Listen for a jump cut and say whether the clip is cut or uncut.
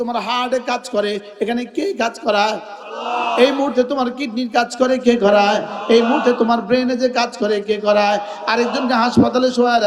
uncut